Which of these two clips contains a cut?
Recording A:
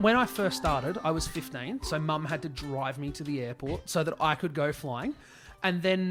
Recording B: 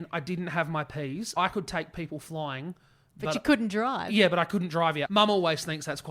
B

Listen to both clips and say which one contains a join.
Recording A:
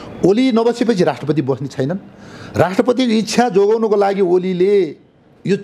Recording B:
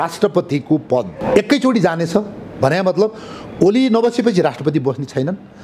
B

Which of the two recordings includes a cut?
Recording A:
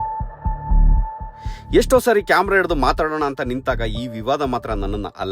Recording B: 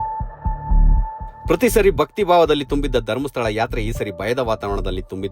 A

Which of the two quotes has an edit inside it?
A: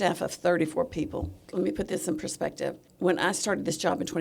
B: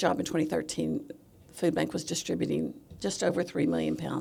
A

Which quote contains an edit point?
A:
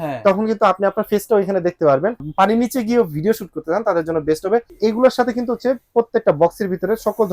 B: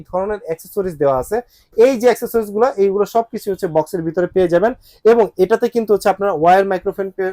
A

